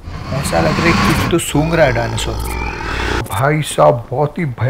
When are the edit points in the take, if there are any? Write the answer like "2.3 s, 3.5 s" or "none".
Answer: 3.3 s

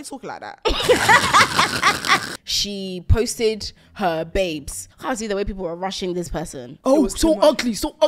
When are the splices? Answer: 2.3 s, 4.9 s, 6.6 s

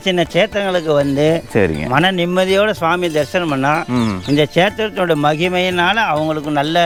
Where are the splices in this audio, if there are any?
none

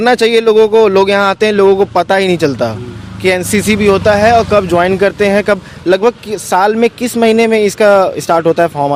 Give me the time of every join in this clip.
none

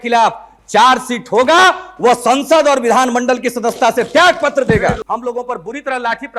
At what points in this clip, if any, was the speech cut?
5.1 s

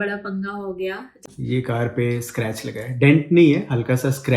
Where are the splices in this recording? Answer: 1.2 s

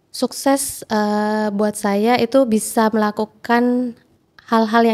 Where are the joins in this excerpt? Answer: none

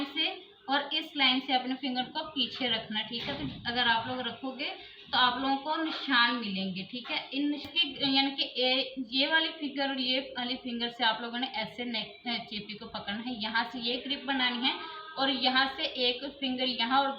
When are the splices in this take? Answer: 7.7 s

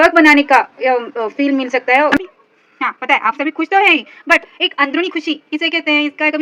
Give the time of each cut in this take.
2.2 s

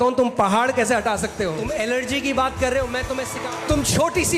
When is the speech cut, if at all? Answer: 1.6 s, 3.3 s

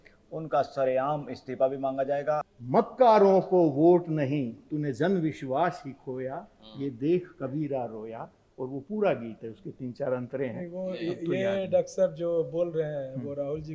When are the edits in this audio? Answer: 2.5 s

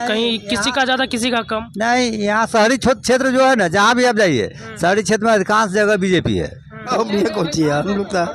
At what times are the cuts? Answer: 6.9 s

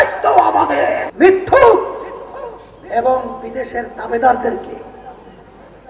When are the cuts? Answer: 1.1 s

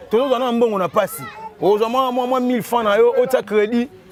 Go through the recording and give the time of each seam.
none

